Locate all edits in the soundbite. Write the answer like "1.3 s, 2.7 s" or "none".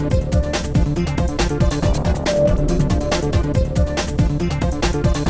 none